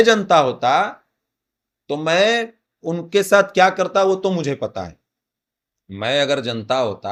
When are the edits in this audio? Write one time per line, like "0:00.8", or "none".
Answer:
none

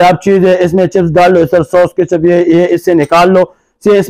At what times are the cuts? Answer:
none

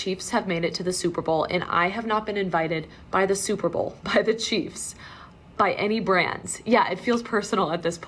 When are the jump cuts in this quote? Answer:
none

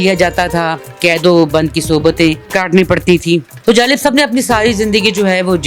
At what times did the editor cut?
0:00.9
0:02.4
0:03.5

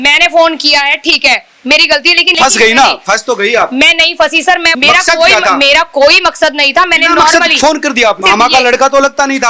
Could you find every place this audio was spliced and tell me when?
0:02.3
0:04.7
0:08.2

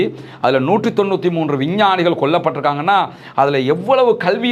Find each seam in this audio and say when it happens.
none

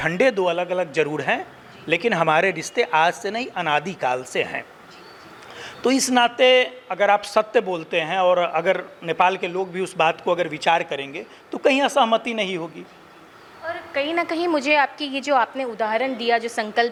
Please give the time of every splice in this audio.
none

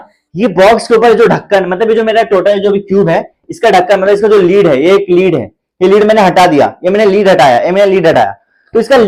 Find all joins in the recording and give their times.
none

